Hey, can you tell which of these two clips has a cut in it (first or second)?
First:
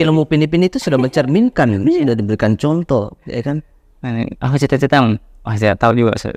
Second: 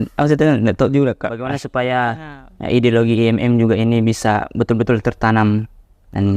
second